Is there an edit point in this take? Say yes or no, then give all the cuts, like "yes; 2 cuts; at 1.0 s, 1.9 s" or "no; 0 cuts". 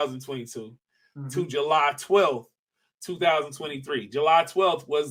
no; 0 cuts